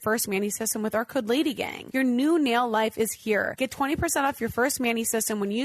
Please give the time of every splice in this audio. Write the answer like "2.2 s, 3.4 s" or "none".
1.7 s, 3.5 s